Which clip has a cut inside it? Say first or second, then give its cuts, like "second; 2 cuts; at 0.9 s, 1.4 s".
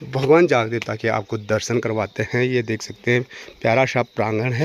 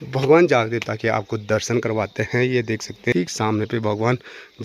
second; 1 cut; at 3.1 s